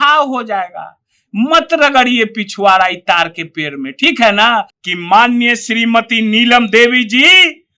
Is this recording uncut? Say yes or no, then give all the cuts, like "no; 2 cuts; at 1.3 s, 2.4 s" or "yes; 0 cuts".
no; 1 cut; at 4.8 s